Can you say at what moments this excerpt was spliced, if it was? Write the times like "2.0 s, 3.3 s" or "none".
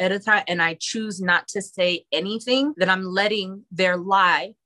2.7 s